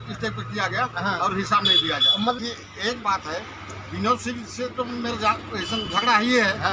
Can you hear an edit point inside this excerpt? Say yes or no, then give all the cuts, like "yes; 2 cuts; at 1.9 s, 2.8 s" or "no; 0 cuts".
yes; 1 cut; at 2.4 s